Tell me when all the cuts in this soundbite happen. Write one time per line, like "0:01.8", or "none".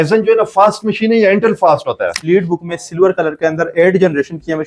0:02.2